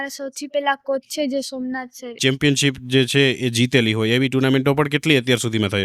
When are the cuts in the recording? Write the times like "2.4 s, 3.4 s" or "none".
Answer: 2.1 s